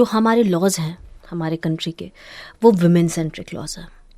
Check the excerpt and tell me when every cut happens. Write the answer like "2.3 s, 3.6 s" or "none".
none

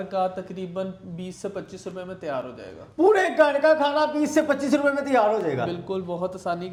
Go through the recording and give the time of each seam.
none

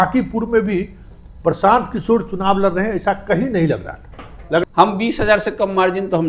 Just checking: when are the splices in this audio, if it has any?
4.6 s

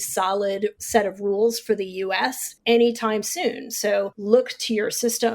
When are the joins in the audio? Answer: 0.8 s, 2.5 s, 4.2 s

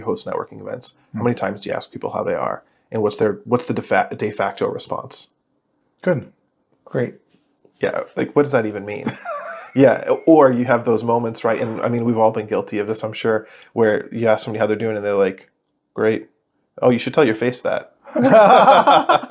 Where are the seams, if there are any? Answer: none

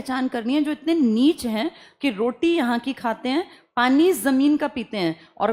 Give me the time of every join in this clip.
none

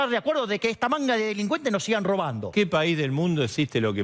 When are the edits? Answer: 2.5 s

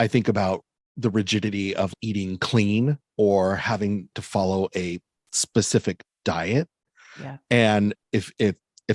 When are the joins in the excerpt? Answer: 1.9 s, 4.1 s

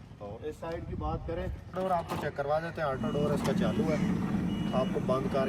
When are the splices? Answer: 1.7 s

